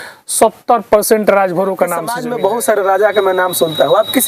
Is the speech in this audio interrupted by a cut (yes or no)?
yes